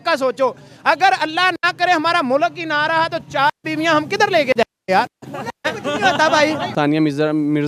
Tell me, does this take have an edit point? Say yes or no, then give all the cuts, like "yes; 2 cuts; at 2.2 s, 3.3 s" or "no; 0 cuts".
yes; 1 cut; at 6.7 s